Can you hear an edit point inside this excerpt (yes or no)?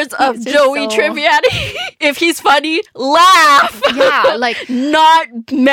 yes